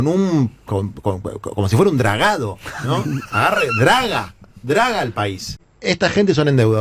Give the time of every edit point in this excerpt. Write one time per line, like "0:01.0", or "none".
0:05.7